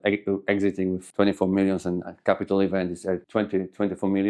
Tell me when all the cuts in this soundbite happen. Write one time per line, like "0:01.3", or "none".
0:03.2